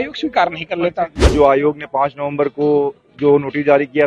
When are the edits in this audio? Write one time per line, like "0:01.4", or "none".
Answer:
0:01.3

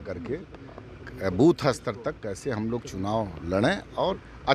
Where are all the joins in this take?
none

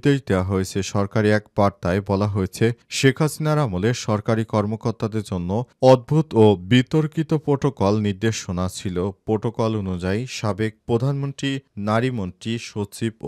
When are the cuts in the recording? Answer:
none

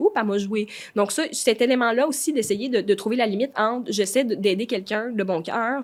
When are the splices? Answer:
none

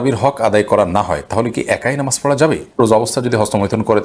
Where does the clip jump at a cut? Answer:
0:02.8

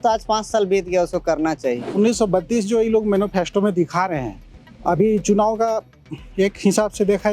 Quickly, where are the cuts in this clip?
0:01.9

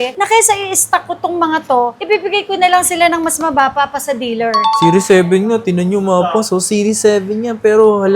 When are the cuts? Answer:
0:02.0
0:04.8

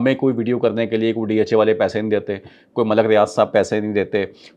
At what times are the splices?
none

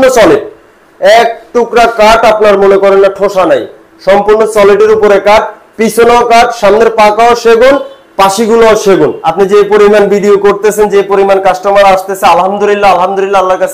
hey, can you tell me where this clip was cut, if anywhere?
0:09.2

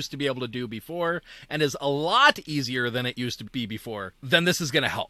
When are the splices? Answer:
0:04.1

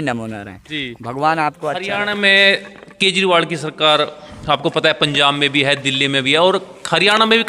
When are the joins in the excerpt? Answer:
0:01.7

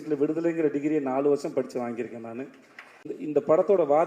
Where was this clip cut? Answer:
0:03.2

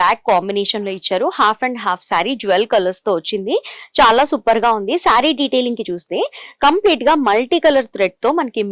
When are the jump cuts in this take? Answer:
none

